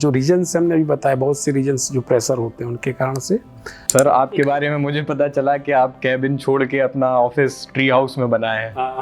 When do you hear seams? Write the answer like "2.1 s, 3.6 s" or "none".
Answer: 3.8 s